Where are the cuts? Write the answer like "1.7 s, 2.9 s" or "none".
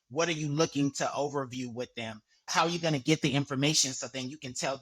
2.5 s

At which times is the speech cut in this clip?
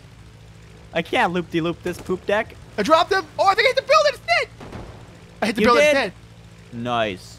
2.6 s

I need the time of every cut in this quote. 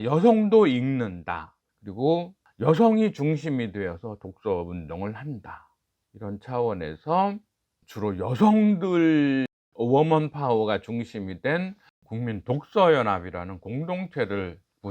none

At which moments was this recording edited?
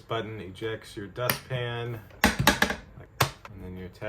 3.0 s

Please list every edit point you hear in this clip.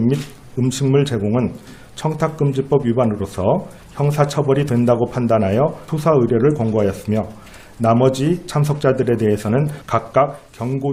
none

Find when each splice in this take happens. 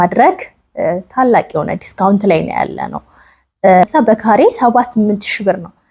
3.8 s

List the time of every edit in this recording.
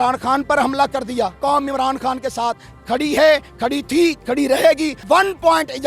1.4 s, 4.9 s

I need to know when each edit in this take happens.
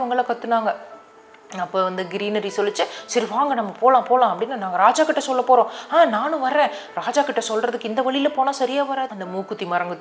9.0 s

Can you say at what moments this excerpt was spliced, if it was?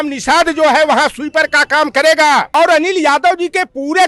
2.5 s

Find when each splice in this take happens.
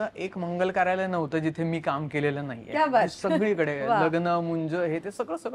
none

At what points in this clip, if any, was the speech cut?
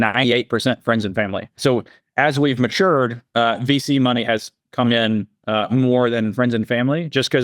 1.6 s

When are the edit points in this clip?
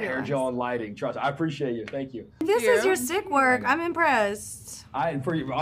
2.2 s

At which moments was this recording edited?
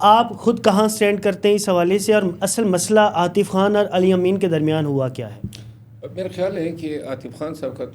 none

